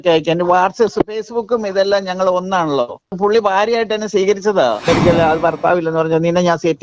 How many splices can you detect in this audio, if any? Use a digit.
2